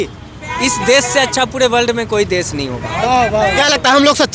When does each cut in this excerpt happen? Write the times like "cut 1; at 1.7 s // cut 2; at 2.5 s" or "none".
none